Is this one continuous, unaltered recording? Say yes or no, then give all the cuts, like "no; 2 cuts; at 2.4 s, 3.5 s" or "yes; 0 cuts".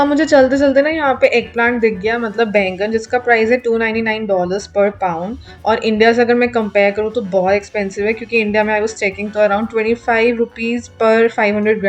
yes; 0 cuts